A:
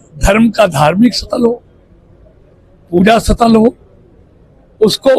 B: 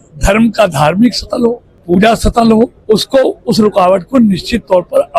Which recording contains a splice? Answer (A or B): B